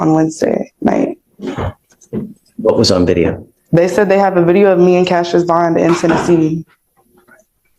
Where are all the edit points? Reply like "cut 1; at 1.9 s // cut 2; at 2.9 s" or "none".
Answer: none